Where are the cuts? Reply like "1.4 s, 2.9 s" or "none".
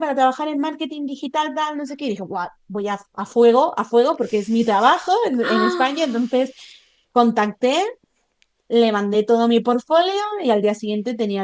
none